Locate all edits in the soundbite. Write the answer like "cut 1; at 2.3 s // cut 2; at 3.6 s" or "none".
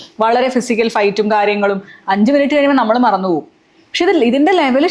none